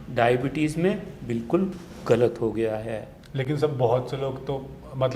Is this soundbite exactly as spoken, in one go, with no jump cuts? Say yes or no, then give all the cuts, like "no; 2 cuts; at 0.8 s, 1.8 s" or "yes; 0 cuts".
yes; 0 cuts